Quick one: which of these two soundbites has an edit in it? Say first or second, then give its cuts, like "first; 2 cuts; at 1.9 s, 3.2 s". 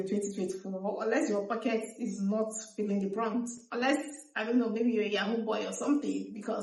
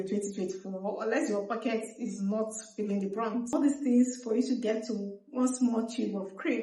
second; 1 cut; at 3.5 s